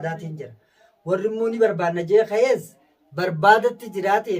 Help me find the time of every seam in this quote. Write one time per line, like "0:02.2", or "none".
none